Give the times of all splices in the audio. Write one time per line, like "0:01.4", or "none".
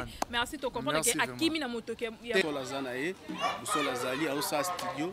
0:02.4